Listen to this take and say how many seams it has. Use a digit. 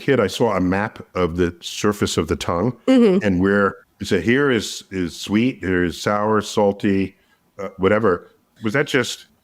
0